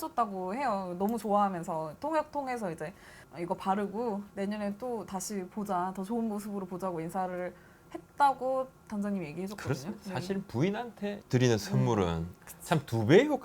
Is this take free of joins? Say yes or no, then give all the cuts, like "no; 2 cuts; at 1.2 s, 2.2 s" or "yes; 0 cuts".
yes; 0 cuts